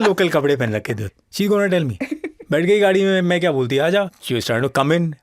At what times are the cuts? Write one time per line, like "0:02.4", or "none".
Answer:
0:01.0
0:04.2